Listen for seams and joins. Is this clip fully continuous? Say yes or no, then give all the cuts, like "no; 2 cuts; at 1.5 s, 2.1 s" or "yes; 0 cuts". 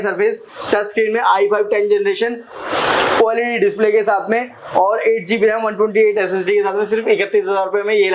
yes; 0 cuts